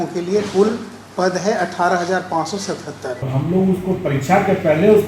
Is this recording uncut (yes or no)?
no